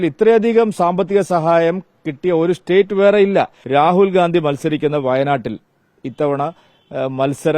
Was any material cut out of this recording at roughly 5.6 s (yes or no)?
no